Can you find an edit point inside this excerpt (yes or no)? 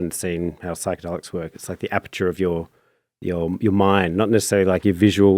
no